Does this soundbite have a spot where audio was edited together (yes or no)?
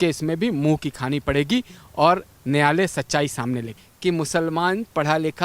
yes